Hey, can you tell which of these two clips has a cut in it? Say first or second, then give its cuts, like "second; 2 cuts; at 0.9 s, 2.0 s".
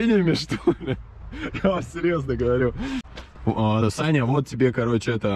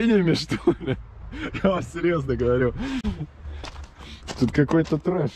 first; 1 cut; at 3.0 s